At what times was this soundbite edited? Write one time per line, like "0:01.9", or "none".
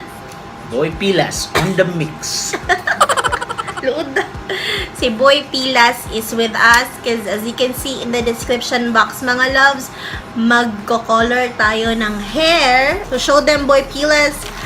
0:13.0